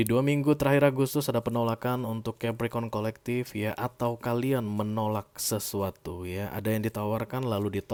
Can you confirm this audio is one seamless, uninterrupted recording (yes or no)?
yes